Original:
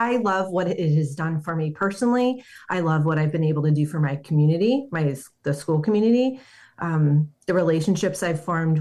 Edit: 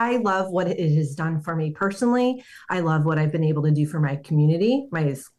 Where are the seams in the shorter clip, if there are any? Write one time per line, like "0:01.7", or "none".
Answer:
none